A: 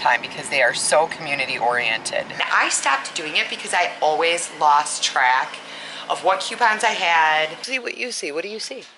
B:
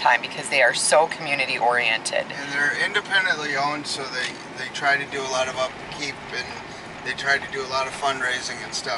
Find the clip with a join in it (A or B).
A